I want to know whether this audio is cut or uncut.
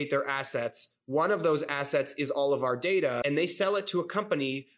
cut